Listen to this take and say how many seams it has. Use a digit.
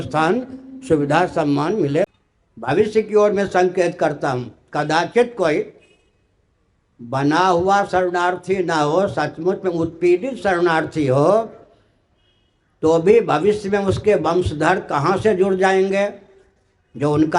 1